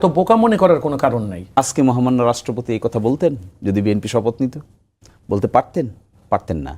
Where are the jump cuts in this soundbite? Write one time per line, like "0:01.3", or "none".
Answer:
0:01.6